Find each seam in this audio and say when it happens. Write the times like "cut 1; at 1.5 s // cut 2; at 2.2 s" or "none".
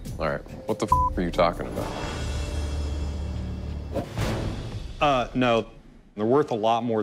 cut 1; at 4.0 s // cut 2; at 5.9 s